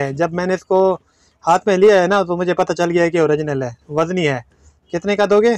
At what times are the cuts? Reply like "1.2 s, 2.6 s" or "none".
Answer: none